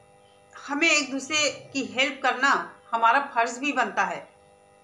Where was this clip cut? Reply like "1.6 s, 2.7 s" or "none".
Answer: none